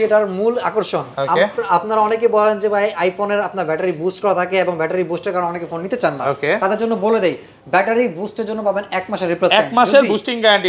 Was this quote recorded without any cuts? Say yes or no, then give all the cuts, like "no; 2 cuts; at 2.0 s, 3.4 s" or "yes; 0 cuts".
yes; 0 cuts